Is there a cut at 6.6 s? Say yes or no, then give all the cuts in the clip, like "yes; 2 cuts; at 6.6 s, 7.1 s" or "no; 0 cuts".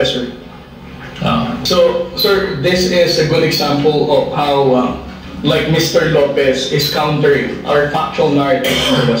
no; 1 cut; at 1.6 s